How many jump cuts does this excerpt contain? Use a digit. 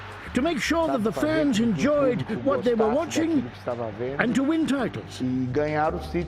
1